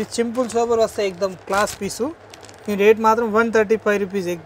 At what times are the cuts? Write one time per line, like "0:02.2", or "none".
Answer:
none